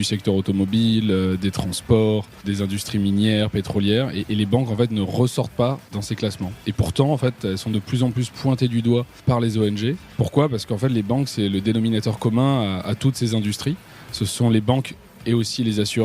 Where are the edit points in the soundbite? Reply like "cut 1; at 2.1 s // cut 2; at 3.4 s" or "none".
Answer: cut 1; at 2.4 s // cut 2; at 5.9 s // cut 3; at 9.2 s // cut 4; at 10.1 s